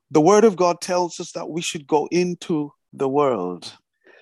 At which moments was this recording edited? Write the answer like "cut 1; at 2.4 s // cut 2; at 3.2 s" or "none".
cut 1; at 2.8 s